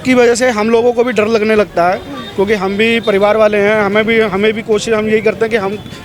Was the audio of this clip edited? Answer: no; 0 cuts

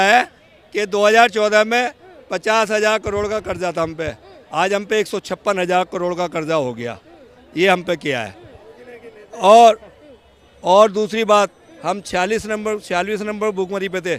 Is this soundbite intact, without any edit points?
yes; 0 cuts

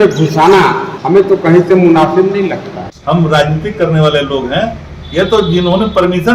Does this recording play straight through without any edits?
no; 2 cuts; at 0.9 s, 3.0 s

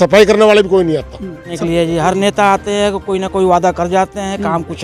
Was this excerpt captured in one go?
no; 1 cut; at 1.5 s

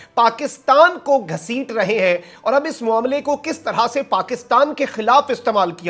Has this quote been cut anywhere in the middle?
no; 0 cuts

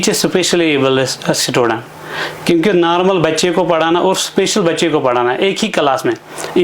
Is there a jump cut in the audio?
no; 0 cuts

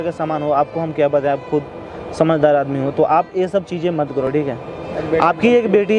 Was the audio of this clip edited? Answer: no; 0 cuts

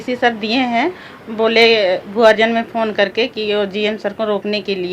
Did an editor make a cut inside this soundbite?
no; 0 cuts

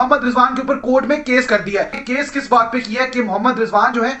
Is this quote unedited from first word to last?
no; 1 cut; at 2.0 s

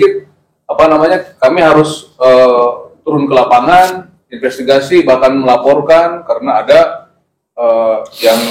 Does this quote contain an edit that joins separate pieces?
no; 0 cuts

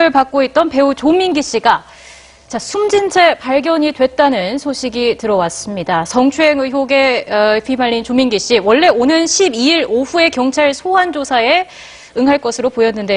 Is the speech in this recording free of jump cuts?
yes; 0 cuts

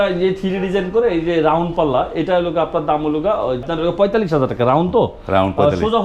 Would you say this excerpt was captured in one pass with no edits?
no; 1 cut; at 3.6 s

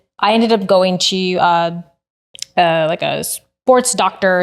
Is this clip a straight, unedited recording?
yes; 0 cuts

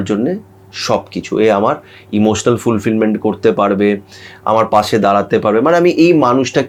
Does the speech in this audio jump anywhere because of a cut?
no; 0 cuts

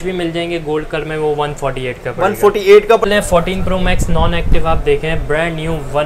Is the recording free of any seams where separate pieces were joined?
no; 1 cut; at 3.1 s

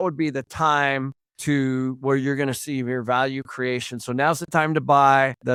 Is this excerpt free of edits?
yes; 0 cuts

